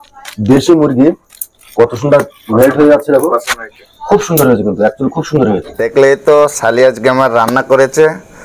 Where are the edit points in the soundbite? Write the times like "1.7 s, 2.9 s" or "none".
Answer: 5.8 s